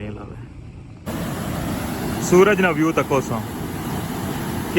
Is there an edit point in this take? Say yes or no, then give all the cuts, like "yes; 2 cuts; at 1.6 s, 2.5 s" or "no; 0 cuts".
yes; 1 cut; at 1.1 s